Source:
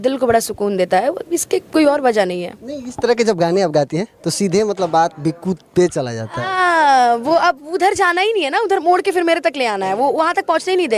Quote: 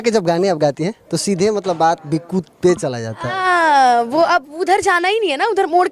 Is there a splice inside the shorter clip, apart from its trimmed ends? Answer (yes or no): no